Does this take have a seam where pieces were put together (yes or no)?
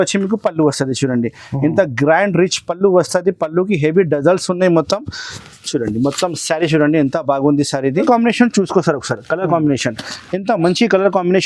yes